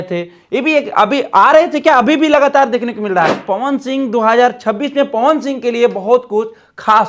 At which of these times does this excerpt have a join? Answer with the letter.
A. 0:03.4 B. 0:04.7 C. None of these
A